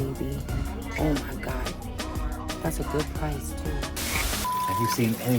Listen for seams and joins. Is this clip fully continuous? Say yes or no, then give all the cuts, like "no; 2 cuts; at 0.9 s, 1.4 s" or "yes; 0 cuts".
no; 1 cut; at 4.5 s